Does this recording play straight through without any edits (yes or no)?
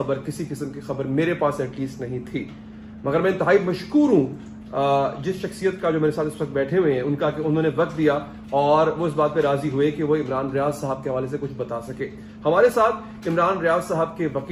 yes